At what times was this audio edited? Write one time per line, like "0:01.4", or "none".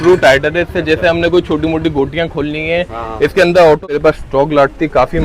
0:03.9